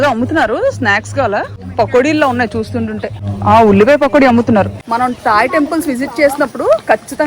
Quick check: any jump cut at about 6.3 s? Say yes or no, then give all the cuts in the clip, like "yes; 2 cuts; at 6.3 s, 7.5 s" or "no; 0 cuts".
no; 3 cuts; at 1.6 s, 3.2 s, 4.8 s